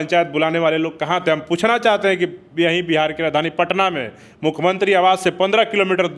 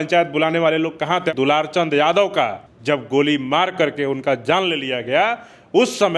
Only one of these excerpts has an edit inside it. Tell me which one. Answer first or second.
second